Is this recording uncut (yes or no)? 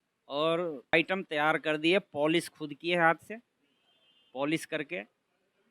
no